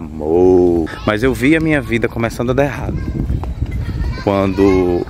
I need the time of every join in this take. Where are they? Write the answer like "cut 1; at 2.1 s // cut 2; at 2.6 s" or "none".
cut 1; at 0.9 s